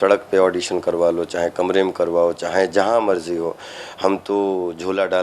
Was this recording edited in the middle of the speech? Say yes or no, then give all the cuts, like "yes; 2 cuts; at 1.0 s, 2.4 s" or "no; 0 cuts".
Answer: no; 0 cuts